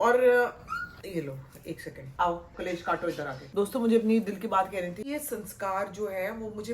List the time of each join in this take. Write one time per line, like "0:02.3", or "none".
0:02.5
0:03.4
0:05.1